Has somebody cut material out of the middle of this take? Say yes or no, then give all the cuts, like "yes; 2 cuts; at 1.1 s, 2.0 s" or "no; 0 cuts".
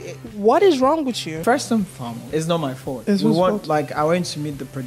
yes; 3 cuts; at 1.4 s, 2.2 s, 3.0 s